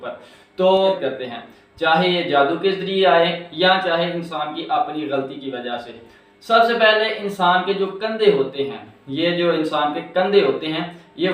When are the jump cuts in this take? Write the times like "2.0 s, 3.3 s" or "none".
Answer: 0.9 s